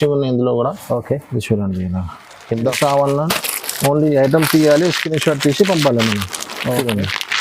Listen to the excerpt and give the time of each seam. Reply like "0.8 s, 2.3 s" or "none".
2.8 s